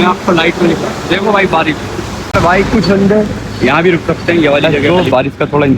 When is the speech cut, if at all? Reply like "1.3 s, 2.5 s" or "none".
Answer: 2.3 s, 4.8 s